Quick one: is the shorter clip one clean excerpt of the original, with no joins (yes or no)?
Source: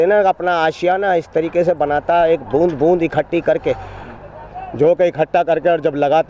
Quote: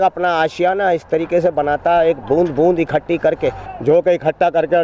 no